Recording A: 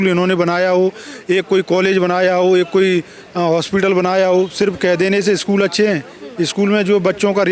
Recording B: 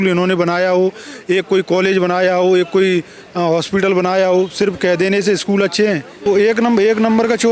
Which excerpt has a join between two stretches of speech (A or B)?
B